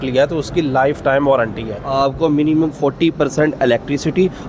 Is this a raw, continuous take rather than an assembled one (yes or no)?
no